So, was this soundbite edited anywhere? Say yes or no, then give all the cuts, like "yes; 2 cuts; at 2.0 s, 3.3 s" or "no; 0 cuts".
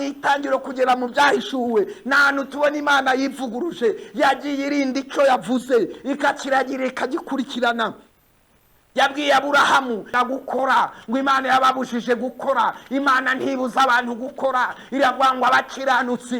yes; 1 cut; at 10.1 s